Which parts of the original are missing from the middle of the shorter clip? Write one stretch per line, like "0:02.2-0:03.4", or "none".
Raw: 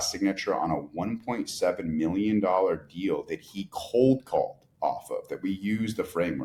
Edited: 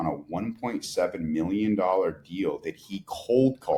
none